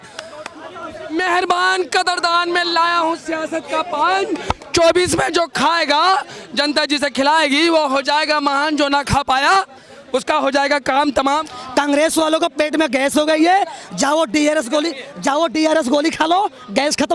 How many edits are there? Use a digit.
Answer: 2